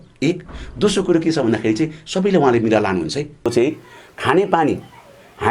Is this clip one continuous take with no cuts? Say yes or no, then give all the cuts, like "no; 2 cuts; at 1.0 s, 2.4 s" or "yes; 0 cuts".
no; 1 cut; at 3.5 s